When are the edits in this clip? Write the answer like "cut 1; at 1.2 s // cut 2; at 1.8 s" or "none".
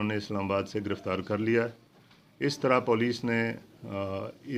none